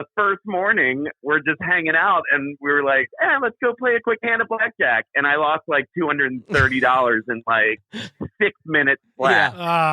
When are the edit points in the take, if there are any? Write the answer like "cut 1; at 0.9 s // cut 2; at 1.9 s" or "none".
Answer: cut 1; at 1.1 s